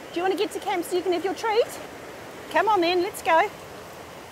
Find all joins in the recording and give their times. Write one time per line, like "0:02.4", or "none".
0:02.4